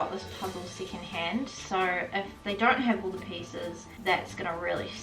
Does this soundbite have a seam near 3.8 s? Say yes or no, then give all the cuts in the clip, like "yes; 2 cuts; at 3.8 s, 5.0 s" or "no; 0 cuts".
yes; 1 cut; at 3.8 s